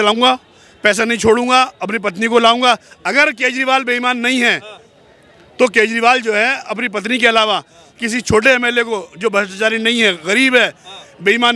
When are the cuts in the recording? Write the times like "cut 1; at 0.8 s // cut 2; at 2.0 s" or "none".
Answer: none